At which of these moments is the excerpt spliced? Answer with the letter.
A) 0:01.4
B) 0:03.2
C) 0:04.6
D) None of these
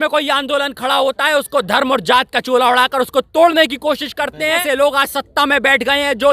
C